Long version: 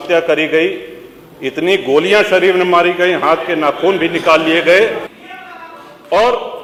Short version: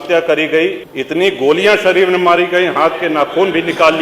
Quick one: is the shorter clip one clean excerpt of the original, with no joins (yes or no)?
no